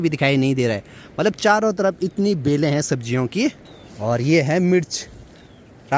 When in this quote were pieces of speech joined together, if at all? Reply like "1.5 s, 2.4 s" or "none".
none